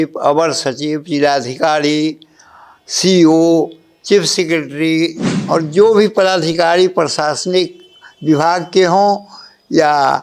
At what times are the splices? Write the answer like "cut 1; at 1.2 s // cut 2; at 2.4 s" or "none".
cut 1; at 5.3 s